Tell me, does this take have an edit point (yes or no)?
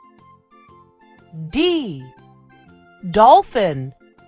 yes